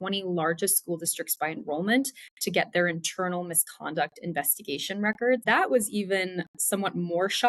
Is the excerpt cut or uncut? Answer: cut